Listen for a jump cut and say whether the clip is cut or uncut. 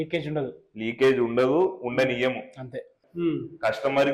cut